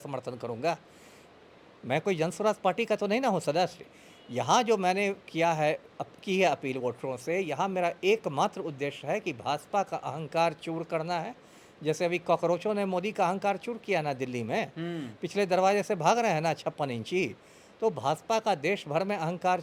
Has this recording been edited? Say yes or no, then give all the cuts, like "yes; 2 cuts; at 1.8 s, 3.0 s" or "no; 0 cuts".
no; 0 cuts